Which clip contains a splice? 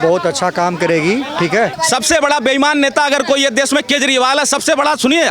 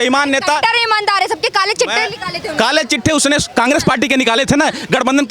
first; 1 cut; at 1.8 s

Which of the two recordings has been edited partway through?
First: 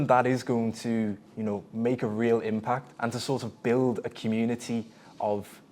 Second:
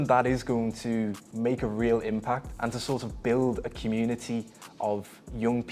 second; 1 cut; at 1.3 s

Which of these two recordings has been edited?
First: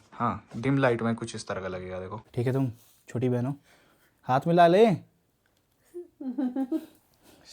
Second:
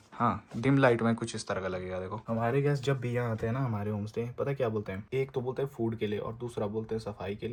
first; 1 cut; at 2.2 s

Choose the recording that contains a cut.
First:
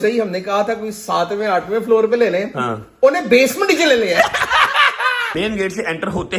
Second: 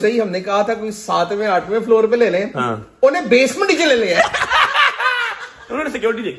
first; 1 cut; at 5.2 s

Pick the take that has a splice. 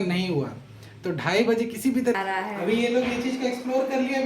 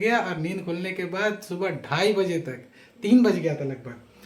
first; 1 cut; at 2.1 s

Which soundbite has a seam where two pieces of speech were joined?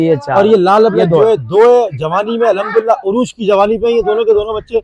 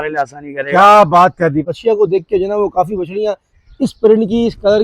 second; 1 cut; at 1.6 s

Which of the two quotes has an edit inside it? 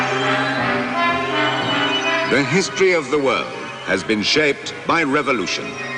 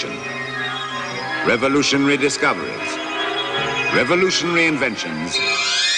second; 1 cut; at 1.4 s

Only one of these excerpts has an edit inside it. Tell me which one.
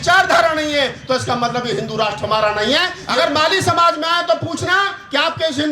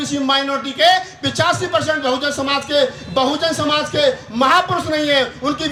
first; 1 cut; at 3.0 s

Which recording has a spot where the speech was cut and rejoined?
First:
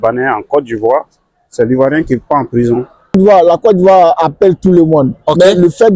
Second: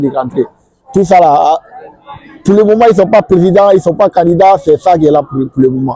first; 1 cut; at 3.1 s

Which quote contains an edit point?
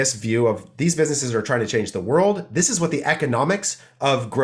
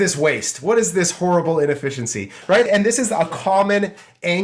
second; 1 cut; at 2.7 s

